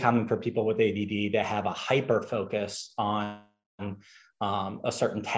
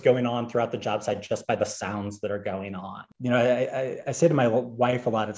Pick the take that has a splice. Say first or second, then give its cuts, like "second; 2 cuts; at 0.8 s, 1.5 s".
second; 1 cut; at 3.0 s